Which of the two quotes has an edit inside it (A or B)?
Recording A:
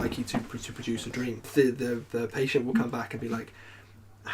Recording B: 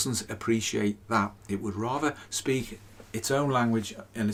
A